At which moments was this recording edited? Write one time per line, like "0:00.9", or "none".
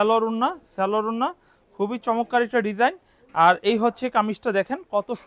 none